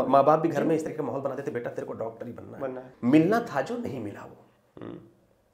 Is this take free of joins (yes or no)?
no